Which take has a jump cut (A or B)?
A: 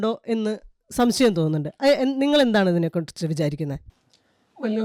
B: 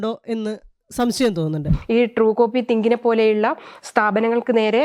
B